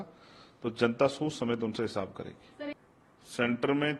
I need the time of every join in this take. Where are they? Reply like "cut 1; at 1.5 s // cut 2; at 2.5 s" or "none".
cut 1; at 2.7 s